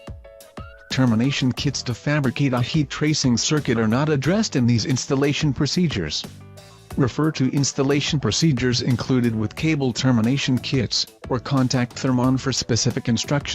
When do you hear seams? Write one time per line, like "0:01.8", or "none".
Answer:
0:00.9